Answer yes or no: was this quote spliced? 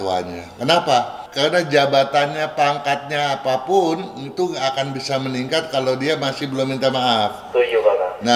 yes